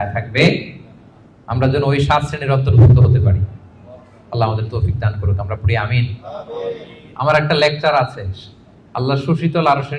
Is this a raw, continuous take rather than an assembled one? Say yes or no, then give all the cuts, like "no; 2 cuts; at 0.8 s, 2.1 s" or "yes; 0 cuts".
yes; 0 cuts